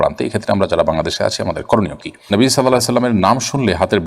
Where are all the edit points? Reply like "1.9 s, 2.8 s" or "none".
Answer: 2.3 s